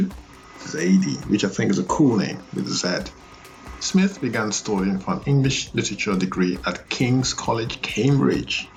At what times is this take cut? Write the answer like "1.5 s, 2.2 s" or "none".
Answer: none